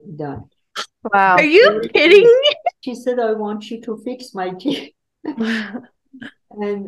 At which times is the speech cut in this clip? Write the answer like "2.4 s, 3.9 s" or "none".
2.8 s

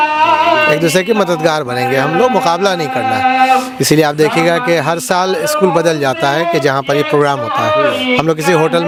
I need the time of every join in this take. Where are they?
none

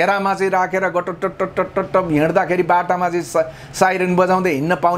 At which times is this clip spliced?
none

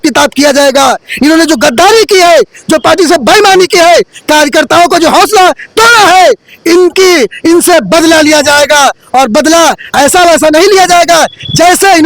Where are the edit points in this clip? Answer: none

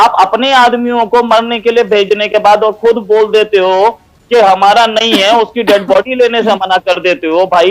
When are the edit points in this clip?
none

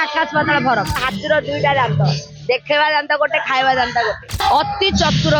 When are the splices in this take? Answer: 1.1 s, 4.3 s

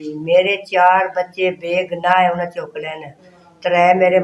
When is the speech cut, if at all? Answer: none

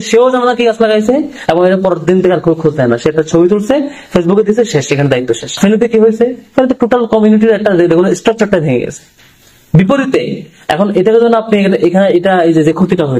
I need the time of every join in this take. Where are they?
5.5 s

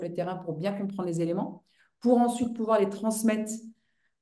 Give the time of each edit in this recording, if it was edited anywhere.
none

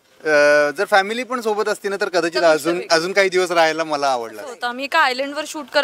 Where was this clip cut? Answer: 4.6 s

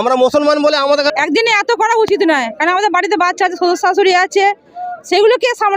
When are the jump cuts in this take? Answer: 1.1 s

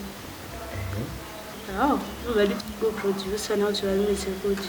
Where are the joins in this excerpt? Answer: 2.6 s

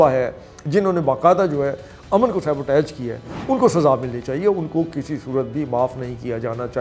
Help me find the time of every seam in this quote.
none

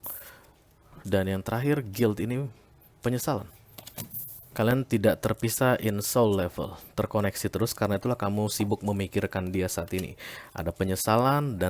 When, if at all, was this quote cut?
4.4 s

